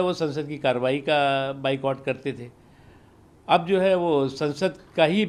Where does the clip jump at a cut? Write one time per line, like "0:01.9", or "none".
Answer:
none